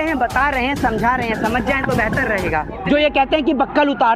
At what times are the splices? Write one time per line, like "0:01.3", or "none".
0:02.8